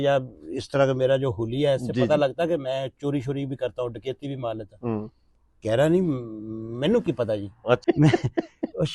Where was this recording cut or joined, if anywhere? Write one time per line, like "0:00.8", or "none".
0:07.8